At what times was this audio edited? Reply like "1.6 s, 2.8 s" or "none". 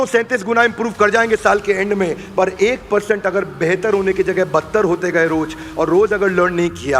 none